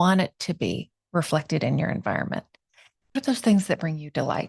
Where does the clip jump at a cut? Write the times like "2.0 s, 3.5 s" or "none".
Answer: 3.1 s